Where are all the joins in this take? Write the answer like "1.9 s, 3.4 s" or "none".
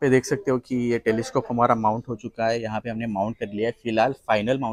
none